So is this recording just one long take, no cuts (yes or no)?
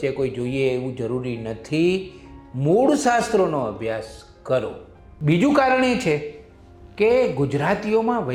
yes